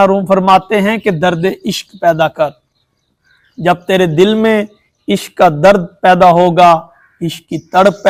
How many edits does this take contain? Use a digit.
0